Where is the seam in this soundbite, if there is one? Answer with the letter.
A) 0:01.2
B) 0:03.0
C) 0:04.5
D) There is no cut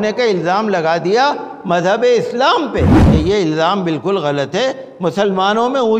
B